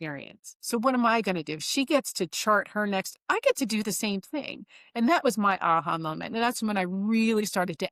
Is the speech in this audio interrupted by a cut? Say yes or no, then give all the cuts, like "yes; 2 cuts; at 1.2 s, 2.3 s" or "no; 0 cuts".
no; 0 cuts